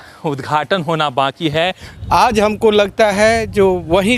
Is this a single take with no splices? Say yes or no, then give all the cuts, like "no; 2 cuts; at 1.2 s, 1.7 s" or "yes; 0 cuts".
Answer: no; 1 cut; at 1.8 s